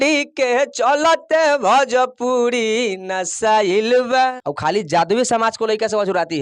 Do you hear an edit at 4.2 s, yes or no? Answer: yes